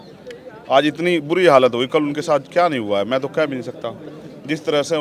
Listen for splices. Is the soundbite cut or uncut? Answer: uncut